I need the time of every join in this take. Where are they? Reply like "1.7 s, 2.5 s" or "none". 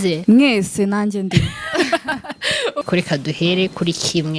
2.9 s